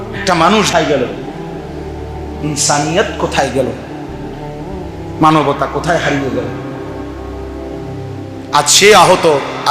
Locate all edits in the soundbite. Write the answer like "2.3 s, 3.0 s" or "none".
1.1 s, 2.4 s, 3.8 s, 5.2 s, 6.5 s, 8.4 s

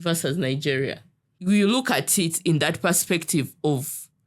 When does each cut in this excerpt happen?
1.3 s

